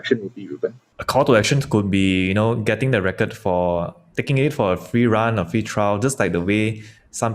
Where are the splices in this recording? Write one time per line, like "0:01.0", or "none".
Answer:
none